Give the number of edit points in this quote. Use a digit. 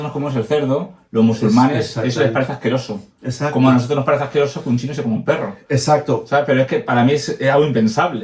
0